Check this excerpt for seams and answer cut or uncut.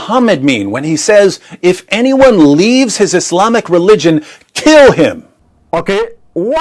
uncut